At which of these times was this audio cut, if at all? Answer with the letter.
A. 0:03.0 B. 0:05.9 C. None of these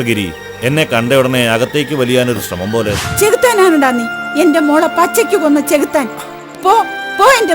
A